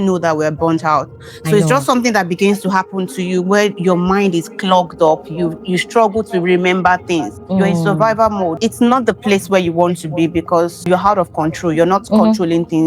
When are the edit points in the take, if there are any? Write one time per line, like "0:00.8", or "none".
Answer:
0:07.4
0:08.6
0:10.9